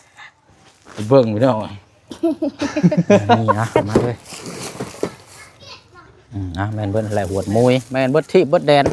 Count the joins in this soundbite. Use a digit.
1